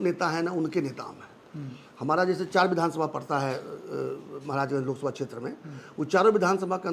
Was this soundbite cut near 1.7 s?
no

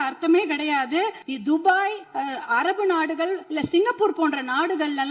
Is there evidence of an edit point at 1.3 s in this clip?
yes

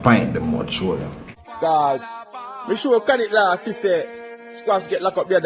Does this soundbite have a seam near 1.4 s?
yes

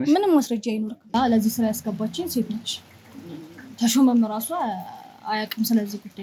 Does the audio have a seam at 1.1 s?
yes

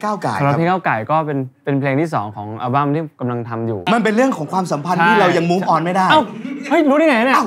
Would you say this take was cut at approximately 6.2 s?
no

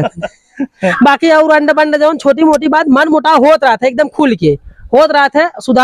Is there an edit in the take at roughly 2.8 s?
no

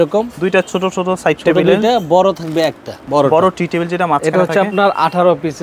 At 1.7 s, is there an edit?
no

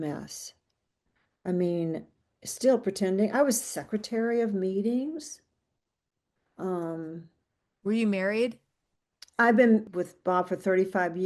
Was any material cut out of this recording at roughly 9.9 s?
yes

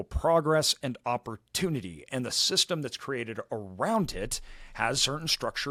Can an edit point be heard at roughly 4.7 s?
no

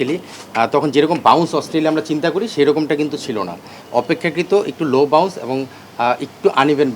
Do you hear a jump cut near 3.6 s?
no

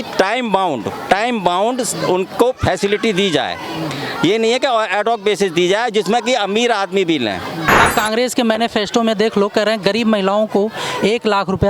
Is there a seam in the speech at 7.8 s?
yes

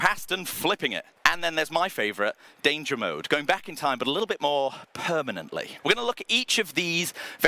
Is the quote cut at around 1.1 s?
yes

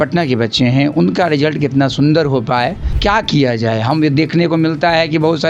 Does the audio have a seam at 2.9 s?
yes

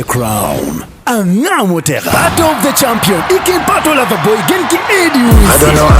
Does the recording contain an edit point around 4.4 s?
no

